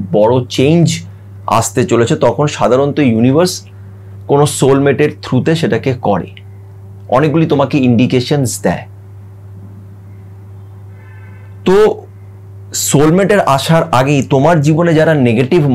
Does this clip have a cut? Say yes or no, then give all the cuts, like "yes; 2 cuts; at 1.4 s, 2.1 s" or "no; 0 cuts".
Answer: no; 0 cuts